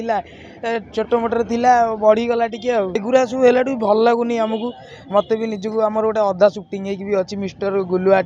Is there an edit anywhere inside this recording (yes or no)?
yes